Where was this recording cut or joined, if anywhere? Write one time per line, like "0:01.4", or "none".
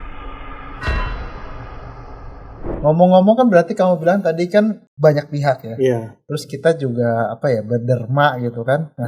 0:02.7